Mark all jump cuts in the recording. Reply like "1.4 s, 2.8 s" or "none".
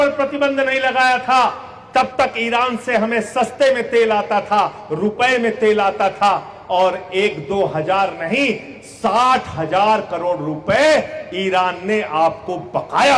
none